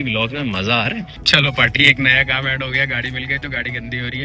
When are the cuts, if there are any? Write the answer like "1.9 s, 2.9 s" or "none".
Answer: 1.1 s